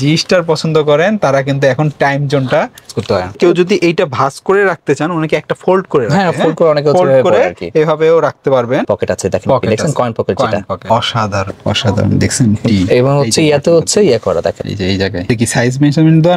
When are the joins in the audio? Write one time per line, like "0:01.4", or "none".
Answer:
0:03.4
0:08.8